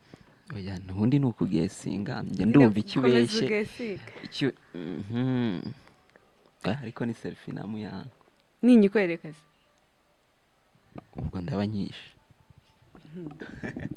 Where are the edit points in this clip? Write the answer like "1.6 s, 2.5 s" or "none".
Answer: none